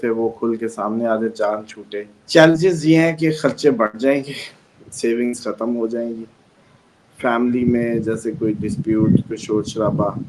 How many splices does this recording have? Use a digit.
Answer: 1